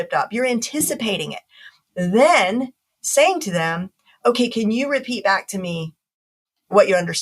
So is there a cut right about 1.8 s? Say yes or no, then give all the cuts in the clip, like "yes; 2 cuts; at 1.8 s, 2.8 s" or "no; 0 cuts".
yes; 1 cut; at 1.8 s